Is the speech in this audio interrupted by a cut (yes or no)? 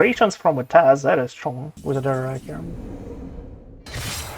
yes